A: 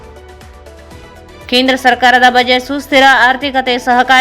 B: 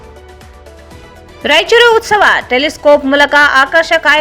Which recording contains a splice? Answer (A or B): A